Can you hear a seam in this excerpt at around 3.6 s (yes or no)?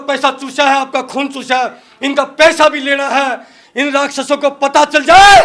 yes